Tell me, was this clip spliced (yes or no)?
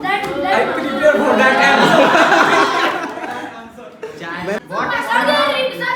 yes